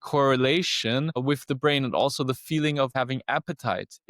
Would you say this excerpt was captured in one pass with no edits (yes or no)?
no